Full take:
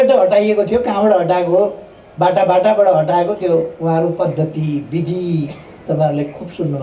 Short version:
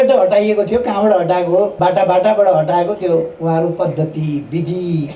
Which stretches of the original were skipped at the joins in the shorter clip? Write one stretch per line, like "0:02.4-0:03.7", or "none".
0:01.7-0:02.1